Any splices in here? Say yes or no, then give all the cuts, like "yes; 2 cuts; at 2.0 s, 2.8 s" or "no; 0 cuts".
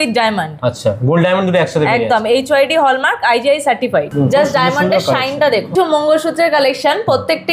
yes; 2 cuts; at 4.1 s, 5.7 s